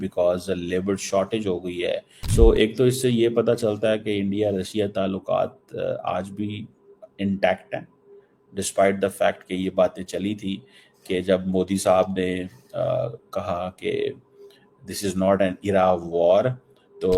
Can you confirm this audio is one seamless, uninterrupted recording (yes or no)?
no